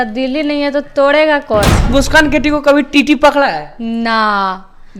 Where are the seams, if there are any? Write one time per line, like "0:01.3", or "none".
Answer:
0:01.9